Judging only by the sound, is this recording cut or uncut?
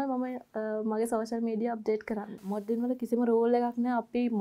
cut